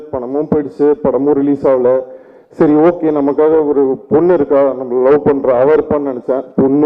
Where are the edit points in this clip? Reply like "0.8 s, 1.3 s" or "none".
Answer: none